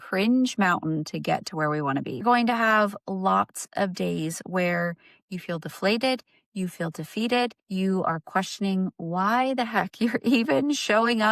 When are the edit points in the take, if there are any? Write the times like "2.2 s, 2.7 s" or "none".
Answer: 7.6 s